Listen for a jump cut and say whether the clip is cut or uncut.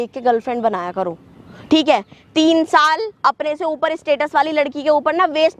uncut